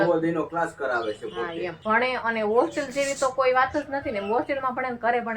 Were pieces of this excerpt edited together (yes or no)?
yes